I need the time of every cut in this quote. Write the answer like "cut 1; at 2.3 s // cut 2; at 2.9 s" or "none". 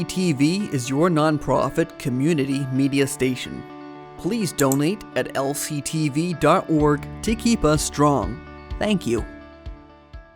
cut 1; at 9.2 s